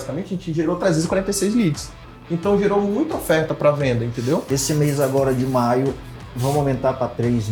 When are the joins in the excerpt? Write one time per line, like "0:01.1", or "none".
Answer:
0:04.4

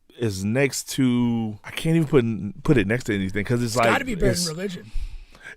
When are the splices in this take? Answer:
0:01.6

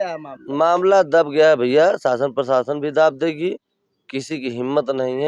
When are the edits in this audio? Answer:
none

